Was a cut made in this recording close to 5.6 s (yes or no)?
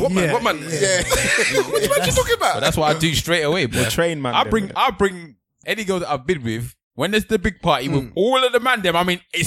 yes